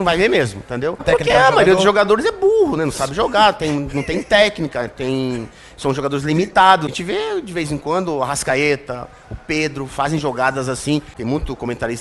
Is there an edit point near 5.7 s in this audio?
no; 3 cuts; at 1.0 s, 6.9 s, 11.1 s

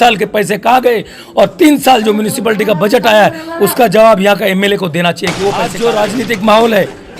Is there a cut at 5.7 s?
yes; 1 cut; at 5.7 s

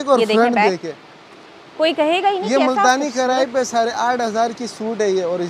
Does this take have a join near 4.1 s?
no; 0 cuts

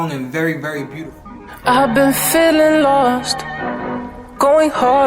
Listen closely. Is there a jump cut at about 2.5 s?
no; 1 cut; at 0.9 s

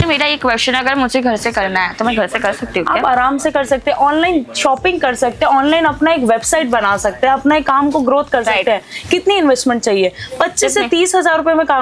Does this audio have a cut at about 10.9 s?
no; 0 cuts

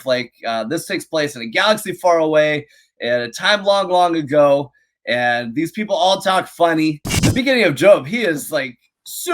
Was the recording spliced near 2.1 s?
no; 1 cut; at 7.1 s

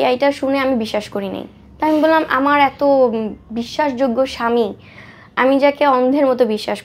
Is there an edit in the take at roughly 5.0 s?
no; 0 cuts

